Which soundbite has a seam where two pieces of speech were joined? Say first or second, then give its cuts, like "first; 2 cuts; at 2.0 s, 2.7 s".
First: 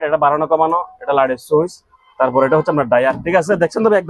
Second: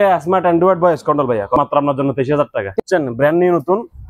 second; 2 cuts; at 1.6 s, 2.8 s